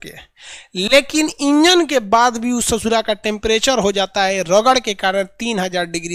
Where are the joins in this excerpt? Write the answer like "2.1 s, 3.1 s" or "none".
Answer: none